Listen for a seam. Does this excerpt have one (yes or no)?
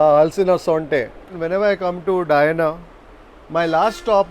no